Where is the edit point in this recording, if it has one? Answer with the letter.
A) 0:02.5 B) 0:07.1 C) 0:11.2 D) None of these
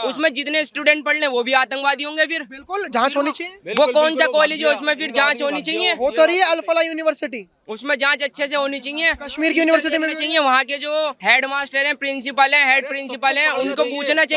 C